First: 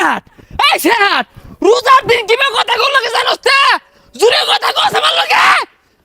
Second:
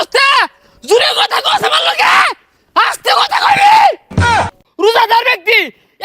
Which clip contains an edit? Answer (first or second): second